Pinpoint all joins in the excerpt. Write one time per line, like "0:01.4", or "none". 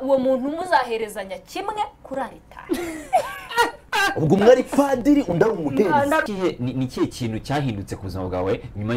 0:06.2